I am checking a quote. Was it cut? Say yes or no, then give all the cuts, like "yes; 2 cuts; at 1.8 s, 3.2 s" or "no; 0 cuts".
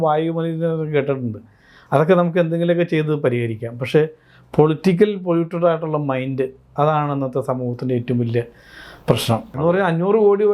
yes; 1 cut; at 9.5 s